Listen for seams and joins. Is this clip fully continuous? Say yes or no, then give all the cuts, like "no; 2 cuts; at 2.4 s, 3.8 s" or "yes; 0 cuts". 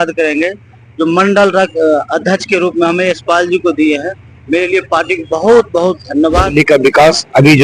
no; 1 cut; at 6.5 s